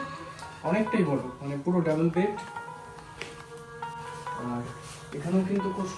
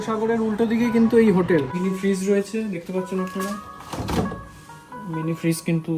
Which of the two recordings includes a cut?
second; 1 cut; at 1.8 s

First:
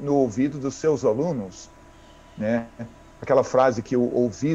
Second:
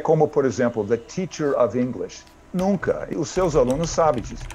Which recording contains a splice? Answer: second; 1 cut; at 3.1 s

